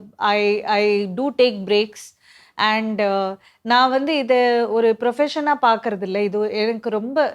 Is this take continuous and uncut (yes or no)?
yes